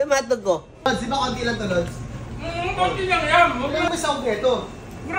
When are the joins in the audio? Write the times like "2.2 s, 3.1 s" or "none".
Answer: 0.8 s, 3.9 s